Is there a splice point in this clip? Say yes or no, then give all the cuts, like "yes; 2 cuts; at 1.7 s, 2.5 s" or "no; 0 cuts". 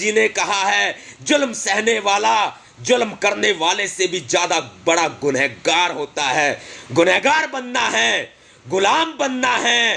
no; 0 cuts